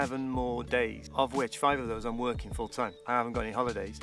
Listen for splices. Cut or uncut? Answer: cut